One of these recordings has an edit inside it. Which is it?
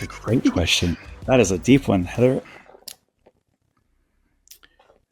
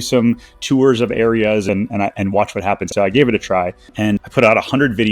second; 3 cuts; at 1.6 s, 2.8 s, 3.8 s

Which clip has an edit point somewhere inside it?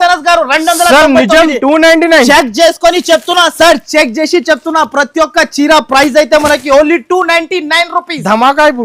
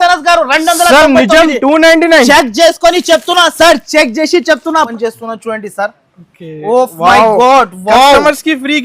second; 1 cut; at 4.9 s

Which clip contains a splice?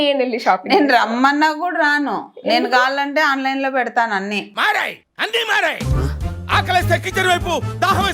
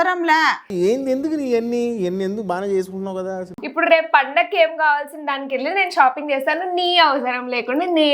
second; 1 cut; at 3.6 s

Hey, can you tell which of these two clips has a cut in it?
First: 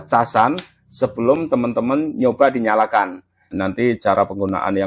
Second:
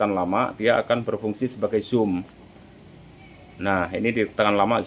first; 1 cut; at 3.5 s

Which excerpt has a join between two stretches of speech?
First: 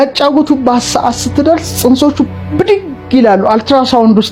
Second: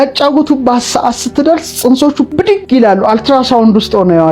second; 1 cut; at 2.5 s

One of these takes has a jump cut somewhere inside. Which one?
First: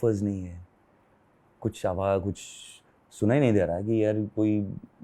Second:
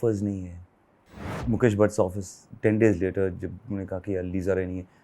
second; 1 cut; at 1.3 s

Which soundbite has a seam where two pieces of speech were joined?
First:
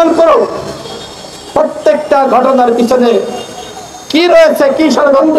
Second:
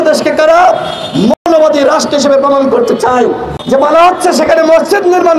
second; 1 cut; at 3.5 s

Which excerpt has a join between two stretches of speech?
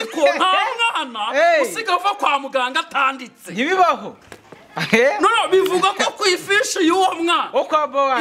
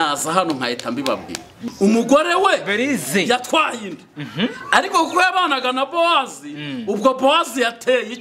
second; 1 cut; at 1.6 s

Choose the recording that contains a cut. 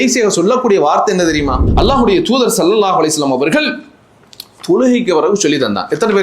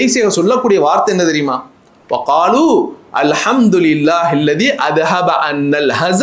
first; 1 cut; at 1.6 s

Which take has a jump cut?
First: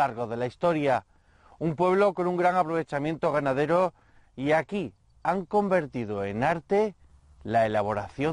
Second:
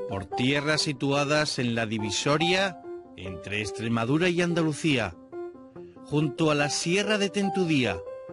first; 1 cut; at 5.7 s

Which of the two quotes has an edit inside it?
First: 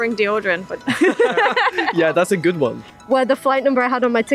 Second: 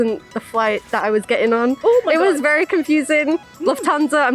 first; 1 cut; at 2.9 s

